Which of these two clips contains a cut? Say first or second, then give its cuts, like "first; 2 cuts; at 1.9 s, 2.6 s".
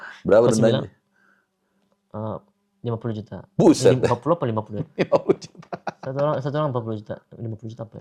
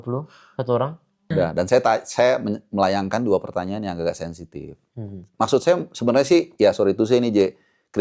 second; 1 cut; at 1.3 s